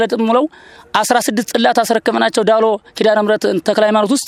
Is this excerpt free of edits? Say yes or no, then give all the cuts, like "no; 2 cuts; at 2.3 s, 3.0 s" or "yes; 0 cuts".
yes; 0 cuts